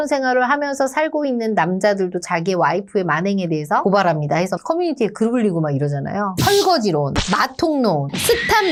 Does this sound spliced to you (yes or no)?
no